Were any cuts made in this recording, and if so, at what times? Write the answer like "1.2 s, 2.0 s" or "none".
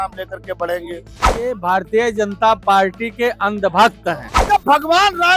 1.2 s, 4.3 s